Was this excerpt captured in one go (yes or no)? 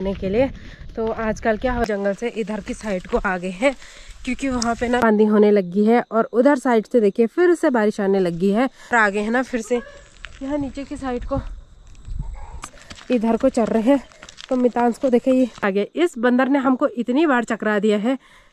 no